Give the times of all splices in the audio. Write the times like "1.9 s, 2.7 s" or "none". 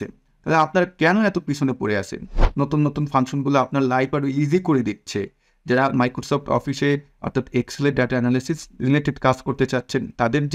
2.4 s